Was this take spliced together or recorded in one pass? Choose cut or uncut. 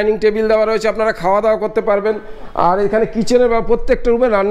uncut